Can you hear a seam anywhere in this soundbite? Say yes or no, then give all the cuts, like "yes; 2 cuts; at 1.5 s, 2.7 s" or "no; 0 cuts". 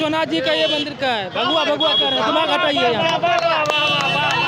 no; 0 cuts